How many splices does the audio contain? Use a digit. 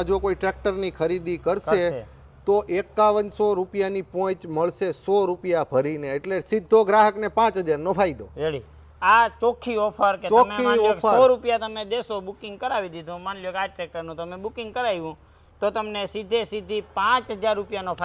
0